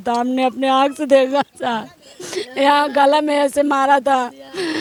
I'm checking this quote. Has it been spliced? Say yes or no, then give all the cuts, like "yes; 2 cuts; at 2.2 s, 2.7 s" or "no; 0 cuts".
no; 0 cuts